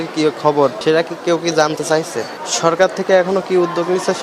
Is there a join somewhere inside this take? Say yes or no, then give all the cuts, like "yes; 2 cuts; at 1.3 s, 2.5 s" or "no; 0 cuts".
no; 0 cuts